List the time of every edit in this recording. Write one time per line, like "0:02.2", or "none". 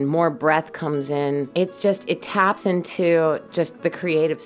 0:01.5